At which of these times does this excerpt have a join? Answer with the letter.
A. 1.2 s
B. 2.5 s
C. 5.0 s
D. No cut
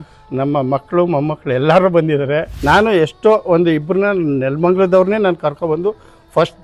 B